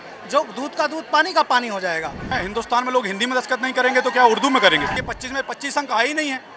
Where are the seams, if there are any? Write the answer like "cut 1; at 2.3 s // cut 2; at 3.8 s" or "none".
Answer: cut 1; at 2.3 s // cut 2; at 4.9 s